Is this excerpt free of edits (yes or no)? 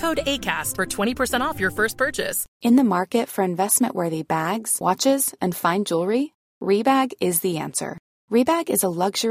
no